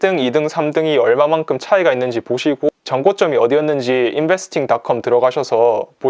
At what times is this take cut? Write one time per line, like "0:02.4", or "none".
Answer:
0:02.7